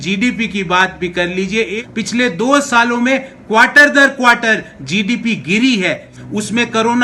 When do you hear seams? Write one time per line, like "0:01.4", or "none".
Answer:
0:01.7
0:06.1